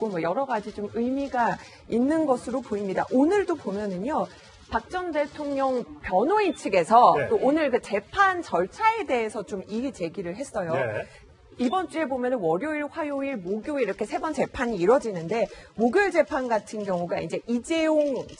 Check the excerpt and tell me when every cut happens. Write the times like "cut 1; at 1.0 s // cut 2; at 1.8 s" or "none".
none